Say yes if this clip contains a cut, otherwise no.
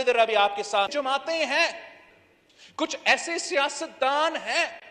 yes